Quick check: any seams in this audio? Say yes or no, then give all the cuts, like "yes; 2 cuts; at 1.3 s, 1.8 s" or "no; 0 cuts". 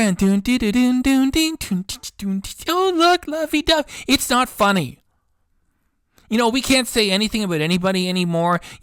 no; 0 cuts